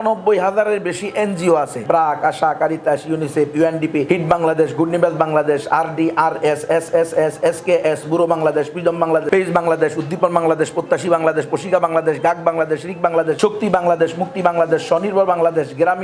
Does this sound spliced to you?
yes; 4 cuts; at 1.8 s, 4.0 s, 9.2 s, 13.4 s

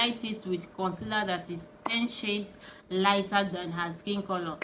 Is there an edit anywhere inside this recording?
no; 0 cuts

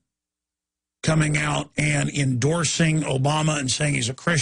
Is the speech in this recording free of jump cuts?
no; 1 cut; at 2.9 s

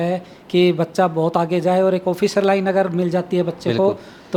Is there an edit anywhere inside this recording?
no; 0 cuts

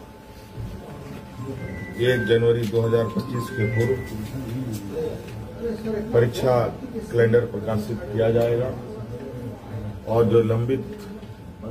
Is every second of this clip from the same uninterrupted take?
yes; 0 cuts

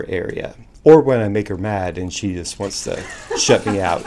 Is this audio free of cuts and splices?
yes; 0 cuts

